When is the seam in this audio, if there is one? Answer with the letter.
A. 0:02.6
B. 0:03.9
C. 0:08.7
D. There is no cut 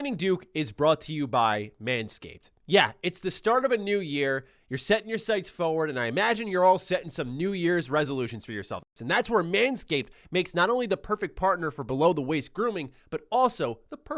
C